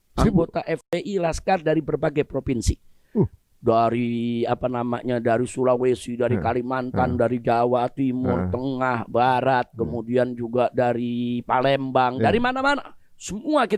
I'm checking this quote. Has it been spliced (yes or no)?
no